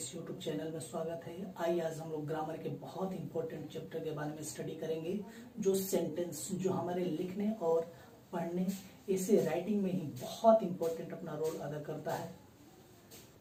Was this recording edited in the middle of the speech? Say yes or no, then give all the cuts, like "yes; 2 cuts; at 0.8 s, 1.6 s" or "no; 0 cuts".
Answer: no; 0 cuts